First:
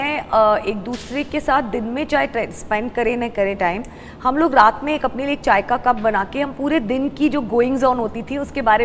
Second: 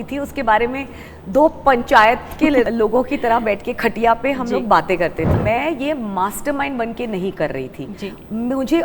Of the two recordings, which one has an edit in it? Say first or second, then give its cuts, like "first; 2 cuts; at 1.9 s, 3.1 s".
second; 2 cuts; at 2.7 s, 5.3 s